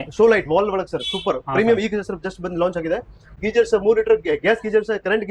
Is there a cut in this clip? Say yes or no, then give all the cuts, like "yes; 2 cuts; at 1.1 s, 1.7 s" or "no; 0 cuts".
yes; 1 cut; at 3.3 s